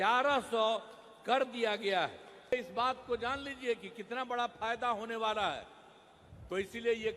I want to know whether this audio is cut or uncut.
cut